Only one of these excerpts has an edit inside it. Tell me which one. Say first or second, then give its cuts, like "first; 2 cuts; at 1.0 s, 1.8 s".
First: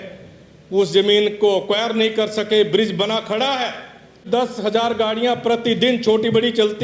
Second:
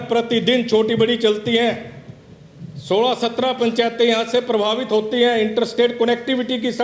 first; 1 cut; at 4.2 s